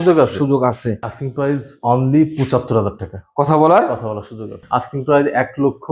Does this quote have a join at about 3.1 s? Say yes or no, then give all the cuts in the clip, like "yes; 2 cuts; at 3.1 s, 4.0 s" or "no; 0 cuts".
no; 2 cuts; at 1.1 s, 4.6 s